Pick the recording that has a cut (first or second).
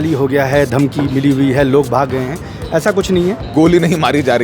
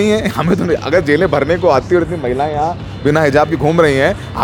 first